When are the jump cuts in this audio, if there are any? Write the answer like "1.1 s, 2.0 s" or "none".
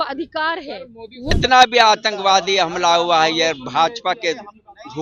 1.3 s